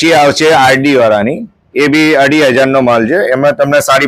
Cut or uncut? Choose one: uncut